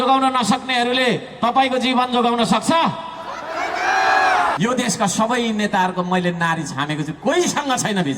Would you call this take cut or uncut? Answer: cut